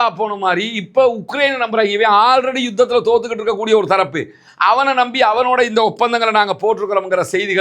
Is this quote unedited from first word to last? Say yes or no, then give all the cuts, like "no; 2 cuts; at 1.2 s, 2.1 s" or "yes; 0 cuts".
yes; 0 cuts